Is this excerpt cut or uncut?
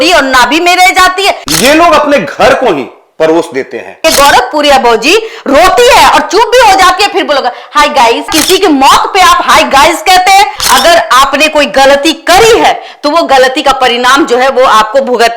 cut